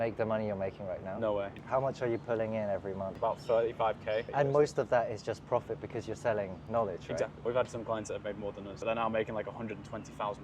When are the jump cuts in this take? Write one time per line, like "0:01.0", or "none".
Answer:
0:01.6
0:03.1
0:04.3
0:07.4
0:08.7